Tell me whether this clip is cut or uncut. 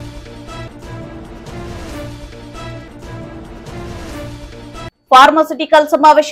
uncut